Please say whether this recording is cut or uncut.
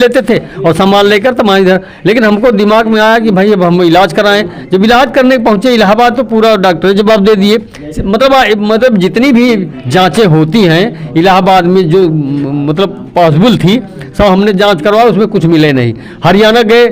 uncut